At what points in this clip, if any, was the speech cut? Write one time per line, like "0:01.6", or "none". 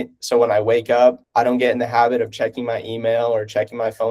0:01.2